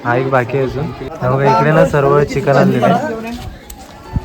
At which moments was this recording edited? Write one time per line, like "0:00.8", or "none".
0:01.1